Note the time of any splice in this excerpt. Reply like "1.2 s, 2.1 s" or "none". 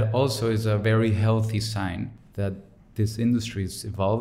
2.4 s